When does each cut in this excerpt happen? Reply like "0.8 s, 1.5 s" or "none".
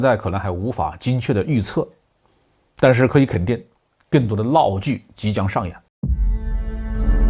5.8 s